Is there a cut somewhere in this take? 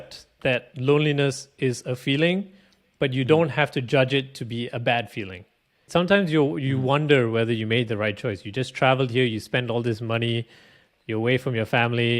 yes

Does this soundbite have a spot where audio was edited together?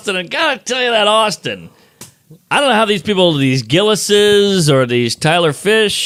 no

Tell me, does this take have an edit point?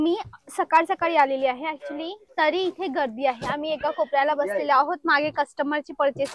no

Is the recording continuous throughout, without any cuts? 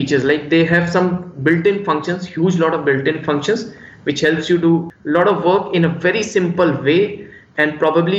no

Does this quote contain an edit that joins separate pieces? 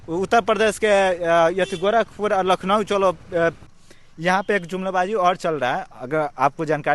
yes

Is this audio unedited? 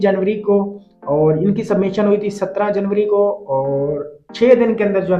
yes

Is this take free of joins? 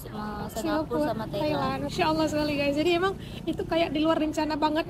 no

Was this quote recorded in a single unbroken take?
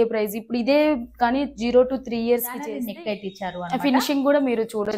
no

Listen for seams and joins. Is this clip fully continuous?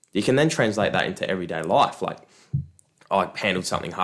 yes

